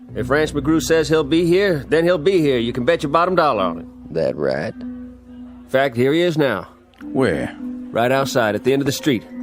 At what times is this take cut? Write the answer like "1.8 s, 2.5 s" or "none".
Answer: none